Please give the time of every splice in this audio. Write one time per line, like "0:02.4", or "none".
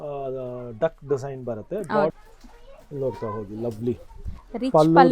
0:02.1

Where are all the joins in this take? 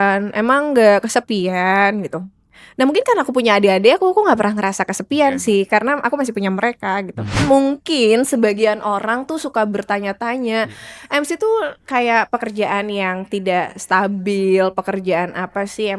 0:07.4

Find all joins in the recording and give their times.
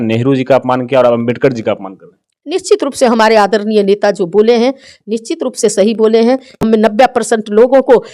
0:06.5

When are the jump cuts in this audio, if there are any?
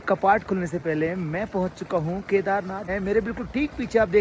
0:02.9

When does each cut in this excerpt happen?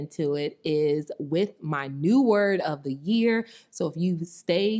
none

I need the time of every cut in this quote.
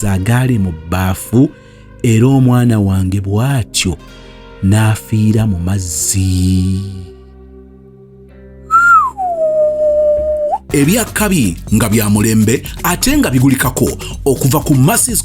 0:10.6

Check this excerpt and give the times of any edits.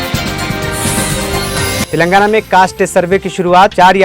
0:01.9

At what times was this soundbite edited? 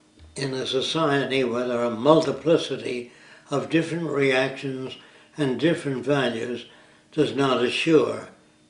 none

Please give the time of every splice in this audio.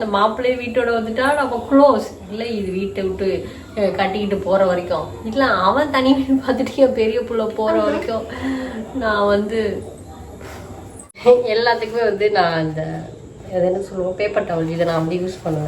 0:11.2

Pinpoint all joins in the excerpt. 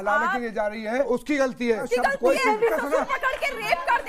0:01.1
0:01.8
0:02.7

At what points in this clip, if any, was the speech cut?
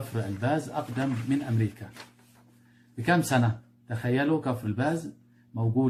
none

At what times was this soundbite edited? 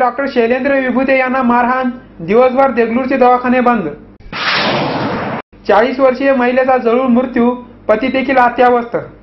none

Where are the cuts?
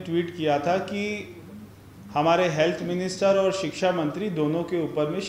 none

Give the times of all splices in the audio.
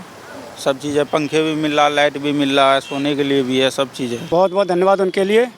0:04.2

